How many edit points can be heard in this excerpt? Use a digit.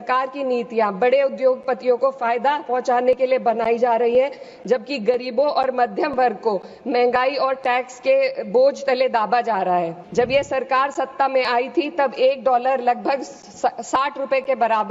1